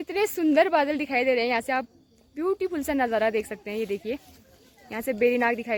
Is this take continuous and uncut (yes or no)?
yes